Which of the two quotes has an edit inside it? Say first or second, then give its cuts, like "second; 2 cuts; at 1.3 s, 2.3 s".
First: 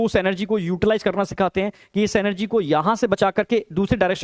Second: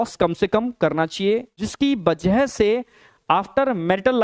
second; 1 cut; at 1.5 s